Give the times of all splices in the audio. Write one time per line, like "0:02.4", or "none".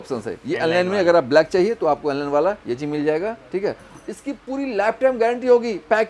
none

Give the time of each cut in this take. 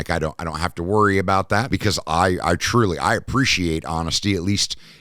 0:01.7

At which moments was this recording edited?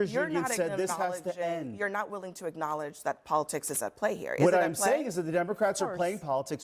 none

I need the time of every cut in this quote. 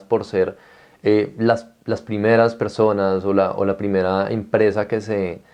none

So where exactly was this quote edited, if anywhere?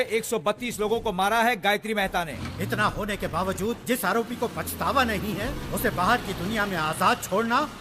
0:02.3

